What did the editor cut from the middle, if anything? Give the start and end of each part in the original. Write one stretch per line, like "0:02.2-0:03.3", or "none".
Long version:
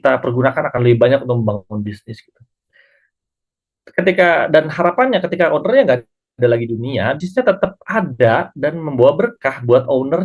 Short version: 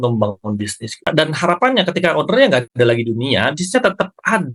0:02.3-0:04.4
0:06.0-0:06.3